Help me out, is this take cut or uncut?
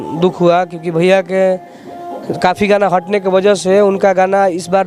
uncut